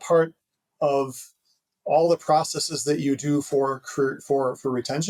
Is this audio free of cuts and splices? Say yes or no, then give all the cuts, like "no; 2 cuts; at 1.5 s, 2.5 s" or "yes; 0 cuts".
yes; 0 cuts